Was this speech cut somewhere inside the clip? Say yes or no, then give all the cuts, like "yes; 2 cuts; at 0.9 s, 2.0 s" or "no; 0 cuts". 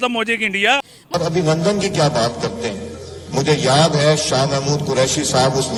no; 0 cuts